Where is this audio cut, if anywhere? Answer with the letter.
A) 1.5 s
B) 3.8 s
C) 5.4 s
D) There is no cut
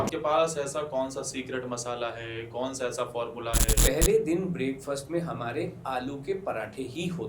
B